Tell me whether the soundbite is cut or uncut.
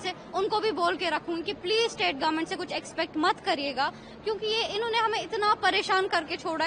uncut